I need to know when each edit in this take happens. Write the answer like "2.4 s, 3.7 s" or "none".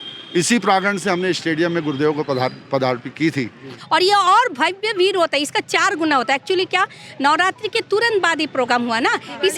3.8 s